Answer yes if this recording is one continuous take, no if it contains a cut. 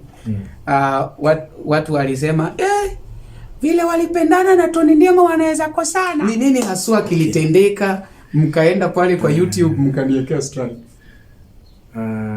no